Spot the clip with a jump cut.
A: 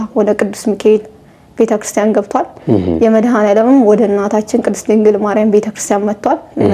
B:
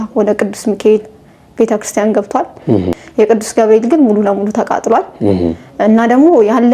B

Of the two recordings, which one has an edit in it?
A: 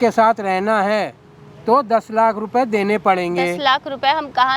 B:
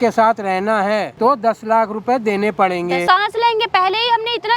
B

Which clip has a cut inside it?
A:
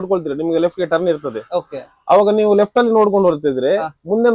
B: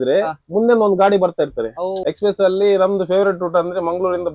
B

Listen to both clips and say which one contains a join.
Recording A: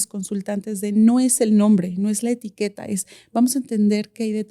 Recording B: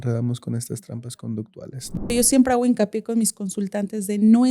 B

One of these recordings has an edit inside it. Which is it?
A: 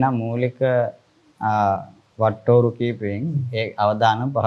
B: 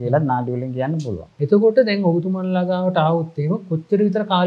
B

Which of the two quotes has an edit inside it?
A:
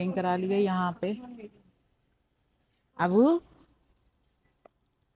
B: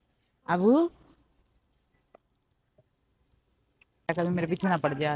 B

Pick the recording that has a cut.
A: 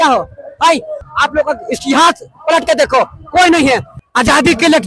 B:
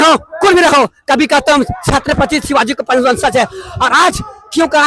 A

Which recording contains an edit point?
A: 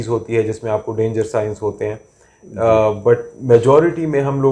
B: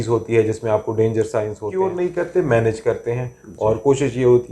B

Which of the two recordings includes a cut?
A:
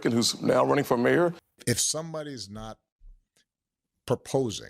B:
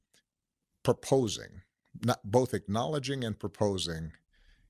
A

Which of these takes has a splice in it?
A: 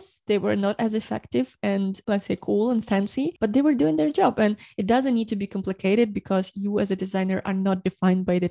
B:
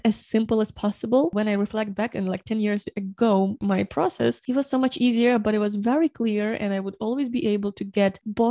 B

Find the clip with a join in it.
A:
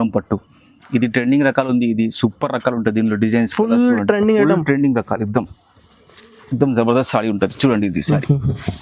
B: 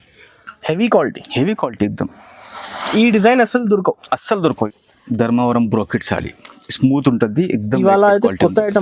B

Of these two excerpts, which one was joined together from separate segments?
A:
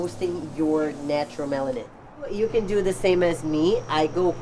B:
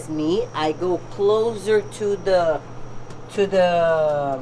A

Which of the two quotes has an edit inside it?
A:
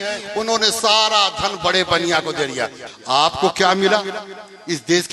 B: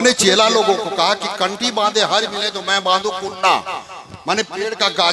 A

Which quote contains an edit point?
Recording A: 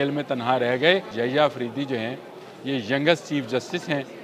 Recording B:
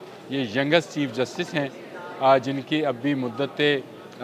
A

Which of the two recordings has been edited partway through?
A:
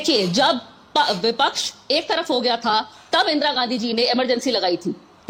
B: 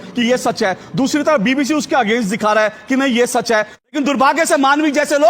B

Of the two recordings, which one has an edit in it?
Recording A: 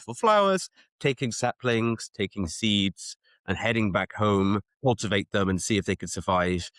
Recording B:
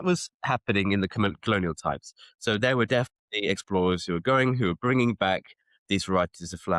A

